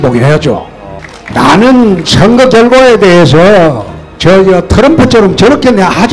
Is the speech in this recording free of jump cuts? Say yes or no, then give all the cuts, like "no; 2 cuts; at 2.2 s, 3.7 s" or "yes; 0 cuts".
yes; 0 cuts